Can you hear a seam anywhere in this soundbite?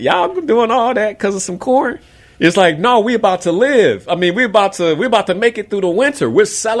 no; 0 cuts

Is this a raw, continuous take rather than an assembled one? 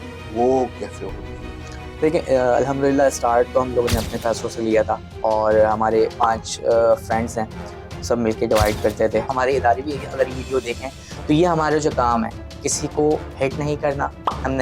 no; 1 cut; at 9.3 s

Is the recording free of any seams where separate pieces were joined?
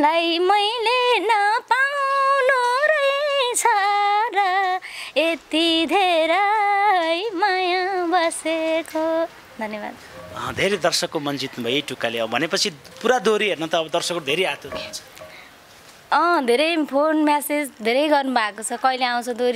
yes; 0 cuts

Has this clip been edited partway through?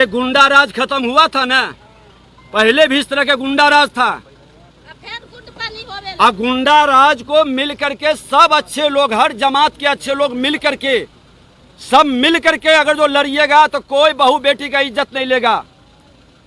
no; 0 cuts

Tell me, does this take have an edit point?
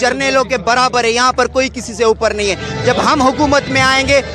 no; 0 cuts

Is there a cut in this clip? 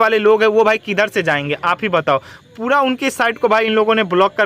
no; 0 cuts

